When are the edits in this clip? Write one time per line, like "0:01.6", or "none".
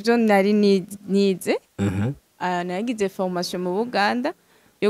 none